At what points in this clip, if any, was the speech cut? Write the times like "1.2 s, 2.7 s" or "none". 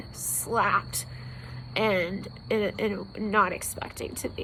none